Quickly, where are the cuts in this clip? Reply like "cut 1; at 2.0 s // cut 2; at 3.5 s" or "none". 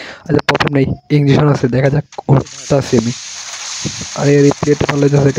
none